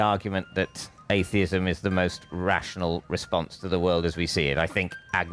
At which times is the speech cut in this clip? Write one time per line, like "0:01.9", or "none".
none